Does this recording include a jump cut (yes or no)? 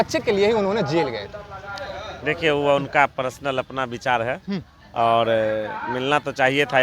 no